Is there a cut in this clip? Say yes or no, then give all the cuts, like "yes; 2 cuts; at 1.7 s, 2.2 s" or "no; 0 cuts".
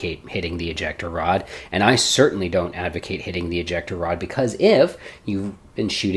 yes; 1 cut; at 1.6 s